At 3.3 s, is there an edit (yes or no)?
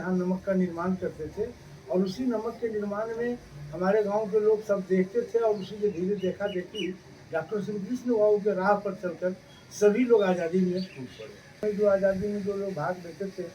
no